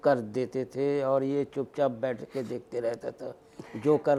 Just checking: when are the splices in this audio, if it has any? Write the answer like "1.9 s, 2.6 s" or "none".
none